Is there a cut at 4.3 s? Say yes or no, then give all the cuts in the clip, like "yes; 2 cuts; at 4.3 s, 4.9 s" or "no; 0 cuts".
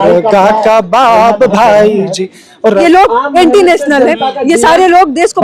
no; 1 cut; at 2.8 s